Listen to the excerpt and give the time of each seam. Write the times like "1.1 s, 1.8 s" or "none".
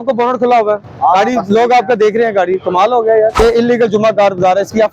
3.4 s